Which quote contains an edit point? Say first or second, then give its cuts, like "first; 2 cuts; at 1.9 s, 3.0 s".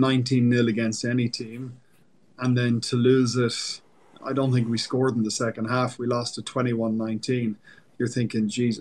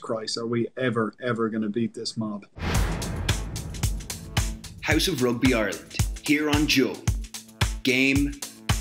second; 1 cut; at 2.6 s